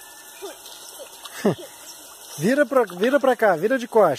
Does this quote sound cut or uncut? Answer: uncut